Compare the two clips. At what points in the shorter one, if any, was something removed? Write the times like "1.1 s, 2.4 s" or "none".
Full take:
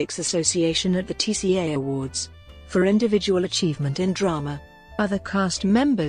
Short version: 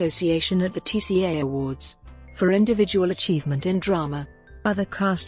none

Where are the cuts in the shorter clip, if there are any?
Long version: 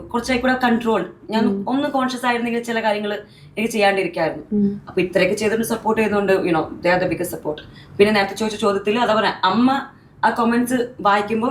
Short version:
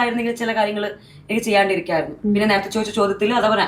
2.4 s

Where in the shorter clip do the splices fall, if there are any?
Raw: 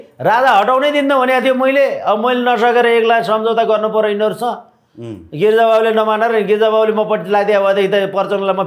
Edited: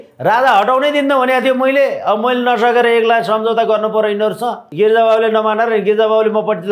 4.6 s

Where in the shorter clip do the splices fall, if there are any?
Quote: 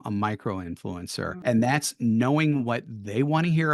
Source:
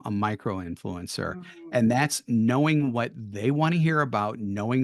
1.3 s

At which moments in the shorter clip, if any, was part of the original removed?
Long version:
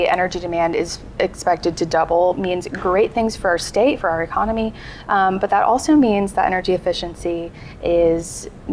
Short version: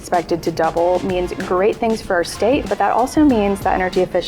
2.7 s

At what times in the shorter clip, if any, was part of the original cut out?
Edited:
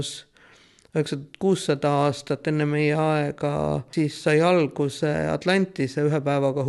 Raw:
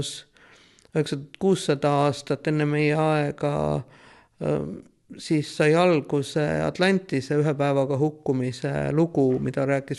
3.9 s

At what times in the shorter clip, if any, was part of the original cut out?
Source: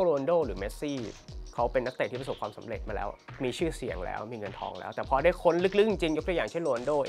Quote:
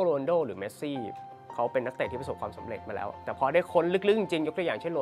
3.2 s

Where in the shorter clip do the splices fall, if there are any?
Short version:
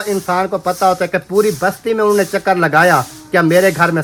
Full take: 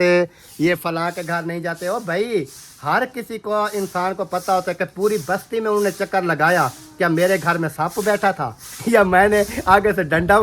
none

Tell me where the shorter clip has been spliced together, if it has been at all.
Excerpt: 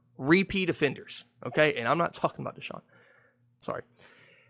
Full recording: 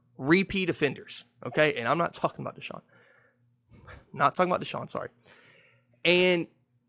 3.6 s

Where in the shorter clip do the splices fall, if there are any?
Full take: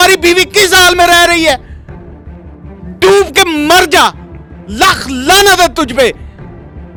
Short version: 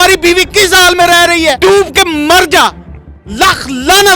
1.6 s

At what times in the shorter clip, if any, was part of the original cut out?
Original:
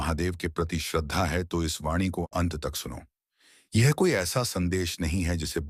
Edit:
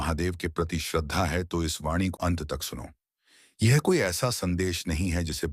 2.1 s

